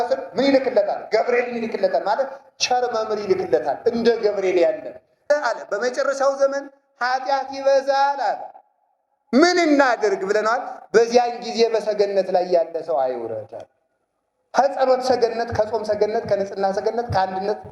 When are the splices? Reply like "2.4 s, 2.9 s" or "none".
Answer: 5.2 s